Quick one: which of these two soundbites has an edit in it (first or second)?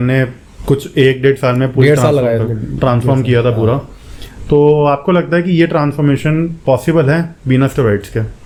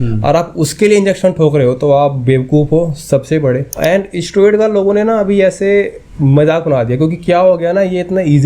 second